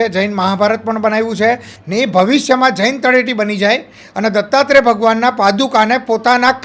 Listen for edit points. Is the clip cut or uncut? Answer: cut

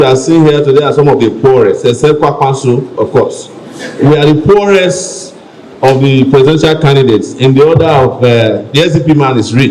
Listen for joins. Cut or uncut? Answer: uncut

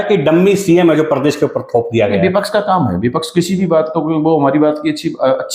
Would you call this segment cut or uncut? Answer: uncut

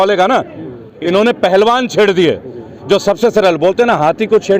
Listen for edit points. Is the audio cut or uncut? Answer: cut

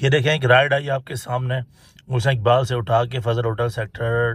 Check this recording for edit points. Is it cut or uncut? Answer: uncut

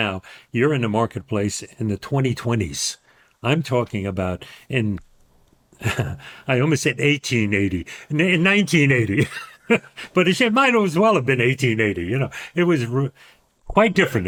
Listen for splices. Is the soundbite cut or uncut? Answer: uncut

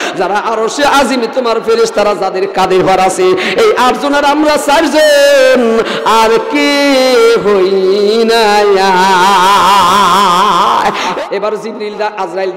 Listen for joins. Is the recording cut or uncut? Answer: cut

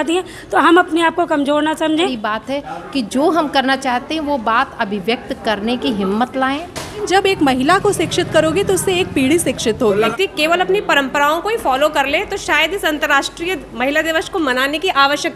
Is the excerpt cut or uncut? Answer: cut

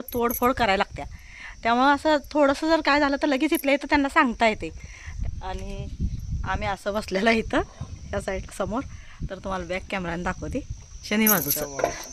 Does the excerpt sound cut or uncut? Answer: uncut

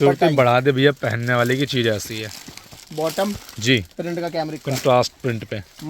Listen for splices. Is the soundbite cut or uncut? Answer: uncut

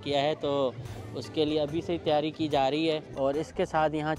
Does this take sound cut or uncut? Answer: cut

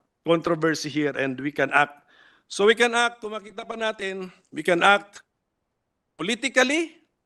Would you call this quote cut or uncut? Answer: uncut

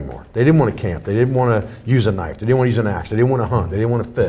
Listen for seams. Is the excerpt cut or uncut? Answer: uncut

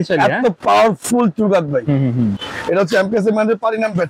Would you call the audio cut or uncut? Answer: cut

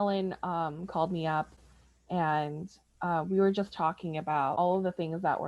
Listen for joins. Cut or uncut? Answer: cut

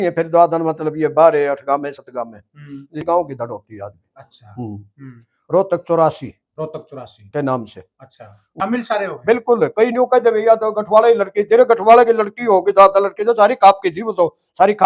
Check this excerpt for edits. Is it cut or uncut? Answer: cut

